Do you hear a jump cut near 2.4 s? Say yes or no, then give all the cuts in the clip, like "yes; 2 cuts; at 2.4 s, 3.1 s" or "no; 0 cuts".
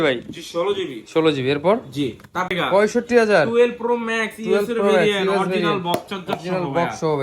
yes; 1 cut; at 2.4 s